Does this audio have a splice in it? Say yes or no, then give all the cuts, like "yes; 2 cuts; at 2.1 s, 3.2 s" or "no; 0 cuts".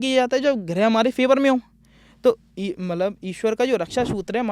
no; 0 cuts